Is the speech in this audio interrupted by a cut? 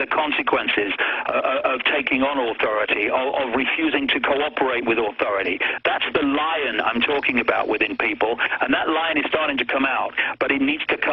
no; 0 cuts

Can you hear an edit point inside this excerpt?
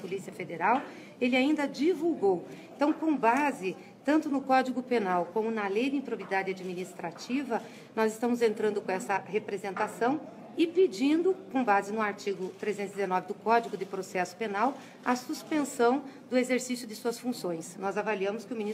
yes; 1 cut; at 2.2 s

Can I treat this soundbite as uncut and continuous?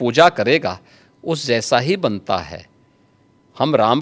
yes; 0 cuts

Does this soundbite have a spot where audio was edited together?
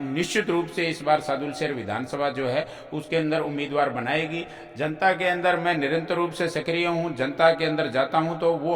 no; 0 cuts

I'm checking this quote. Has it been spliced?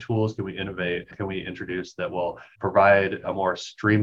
yes; 1 cut; at 2.5 s

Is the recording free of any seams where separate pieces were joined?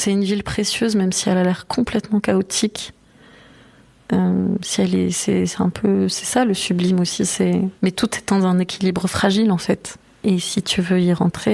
no; 1 cut; at 7.7 s

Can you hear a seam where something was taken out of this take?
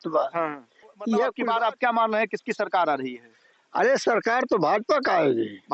yes; 1 cut; at 1.3 s

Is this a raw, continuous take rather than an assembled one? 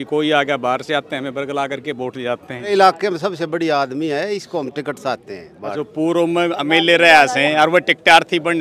no; 2 cuts; at 2.7 s, 5.7 s

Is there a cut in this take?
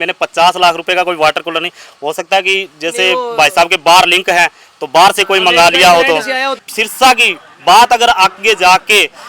yes; 1 cut; at 6.6 s

